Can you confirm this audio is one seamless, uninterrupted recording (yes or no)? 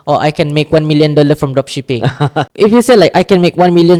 yes